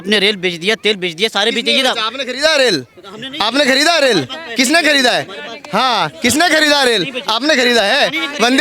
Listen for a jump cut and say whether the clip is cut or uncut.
uncut